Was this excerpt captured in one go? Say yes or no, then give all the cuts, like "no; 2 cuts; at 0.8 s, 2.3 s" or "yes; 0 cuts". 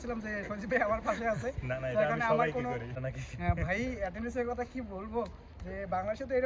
no; 1 cut; at 3.0 s